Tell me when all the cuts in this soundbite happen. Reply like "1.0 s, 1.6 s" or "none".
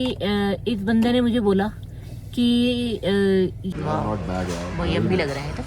3.6 s

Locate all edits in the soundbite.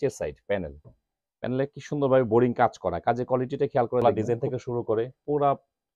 4.0 s

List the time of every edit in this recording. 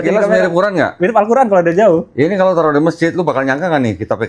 none

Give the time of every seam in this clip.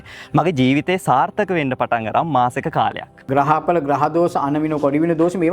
3.2 s

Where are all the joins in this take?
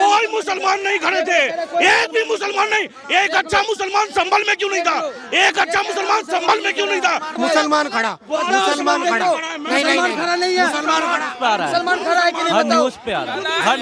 7.3 s

